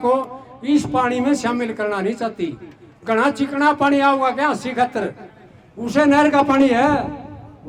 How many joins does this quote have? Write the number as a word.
zero